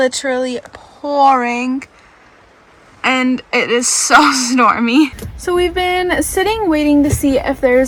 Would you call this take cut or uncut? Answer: uncut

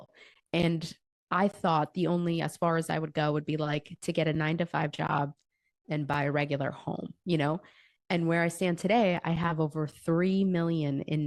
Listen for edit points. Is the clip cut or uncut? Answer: uncut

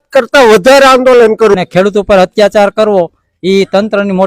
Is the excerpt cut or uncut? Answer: cut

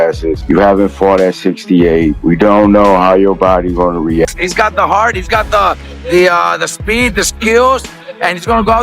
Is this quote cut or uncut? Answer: cut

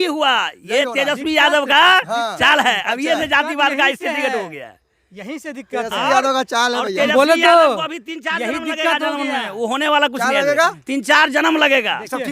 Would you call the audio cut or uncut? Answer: uncut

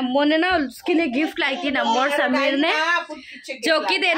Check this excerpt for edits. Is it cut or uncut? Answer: uncut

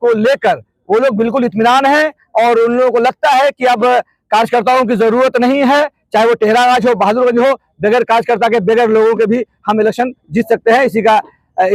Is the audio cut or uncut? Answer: uncut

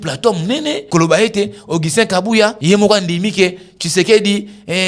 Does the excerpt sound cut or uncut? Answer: cut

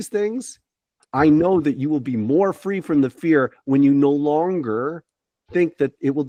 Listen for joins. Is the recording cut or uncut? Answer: uncut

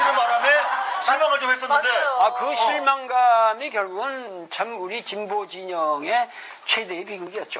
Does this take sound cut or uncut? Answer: uncut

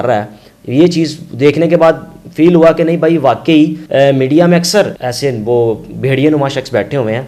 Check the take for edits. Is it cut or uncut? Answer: cut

